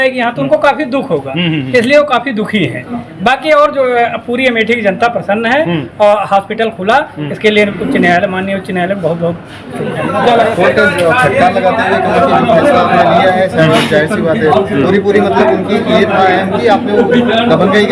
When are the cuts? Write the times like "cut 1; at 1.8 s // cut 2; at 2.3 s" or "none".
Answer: cut 1; at 10.5 s